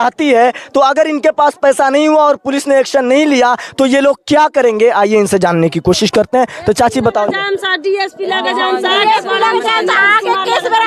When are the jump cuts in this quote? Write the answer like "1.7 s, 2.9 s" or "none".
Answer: none